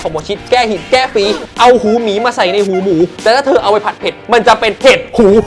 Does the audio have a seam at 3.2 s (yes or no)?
yes